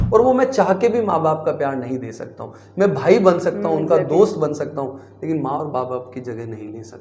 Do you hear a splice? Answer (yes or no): no